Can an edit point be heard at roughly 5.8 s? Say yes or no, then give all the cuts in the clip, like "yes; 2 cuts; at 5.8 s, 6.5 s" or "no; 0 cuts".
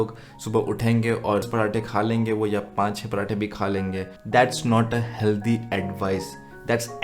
no; 2 cuts; at 1.4 s, 4.2 s